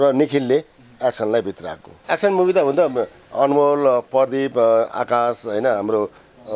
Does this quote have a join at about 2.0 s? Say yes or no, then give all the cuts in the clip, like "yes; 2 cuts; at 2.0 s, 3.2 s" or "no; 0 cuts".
yes; 1 cut; at 2.0 s